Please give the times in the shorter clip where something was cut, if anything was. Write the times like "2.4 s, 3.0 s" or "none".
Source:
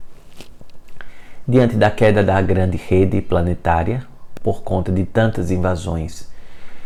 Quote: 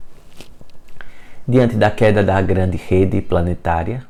none